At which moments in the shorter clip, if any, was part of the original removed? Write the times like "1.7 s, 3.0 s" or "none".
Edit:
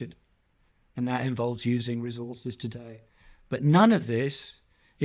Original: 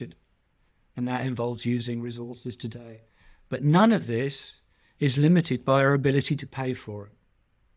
none